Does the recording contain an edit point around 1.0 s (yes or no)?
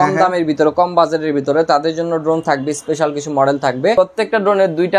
no